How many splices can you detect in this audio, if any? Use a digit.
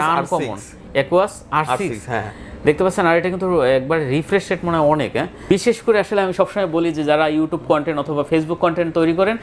1